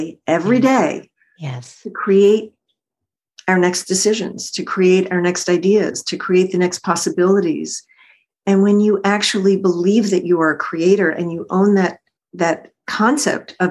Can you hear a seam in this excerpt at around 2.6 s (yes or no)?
no